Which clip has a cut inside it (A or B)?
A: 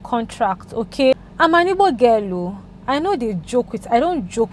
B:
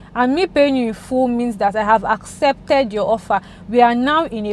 A